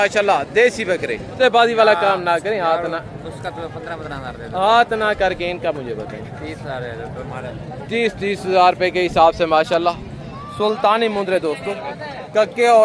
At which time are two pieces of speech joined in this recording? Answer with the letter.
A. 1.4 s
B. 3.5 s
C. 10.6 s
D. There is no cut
A